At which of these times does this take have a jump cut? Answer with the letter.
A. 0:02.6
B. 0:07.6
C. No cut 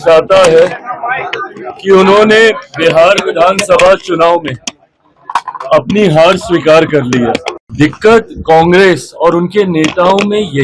B